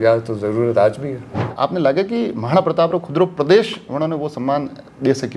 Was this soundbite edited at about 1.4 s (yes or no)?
yes